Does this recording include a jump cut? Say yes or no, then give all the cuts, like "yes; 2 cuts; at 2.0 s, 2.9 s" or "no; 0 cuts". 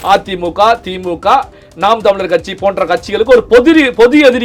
no; 0 cuts